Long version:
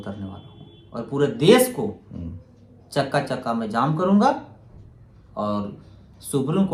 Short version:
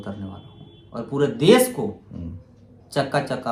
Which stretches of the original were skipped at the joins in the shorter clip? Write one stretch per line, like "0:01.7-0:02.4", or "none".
none